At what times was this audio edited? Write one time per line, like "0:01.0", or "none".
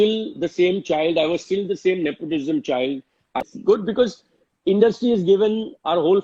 0:03.4